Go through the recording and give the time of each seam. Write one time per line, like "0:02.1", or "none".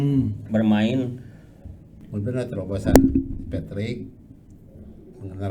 0:02.2